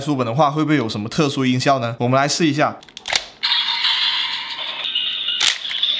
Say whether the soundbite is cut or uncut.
cut